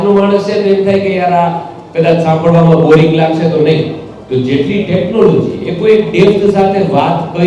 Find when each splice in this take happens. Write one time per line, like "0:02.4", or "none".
none